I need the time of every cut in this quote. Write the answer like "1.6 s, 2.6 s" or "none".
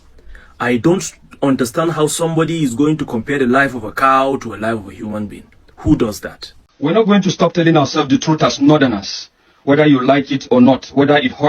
6.7 s